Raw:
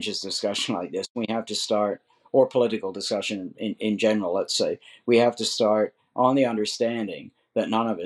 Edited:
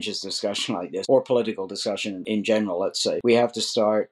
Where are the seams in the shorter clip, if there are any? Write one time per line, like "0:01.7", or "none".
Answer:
0:01.0
0:02.2
0:03.2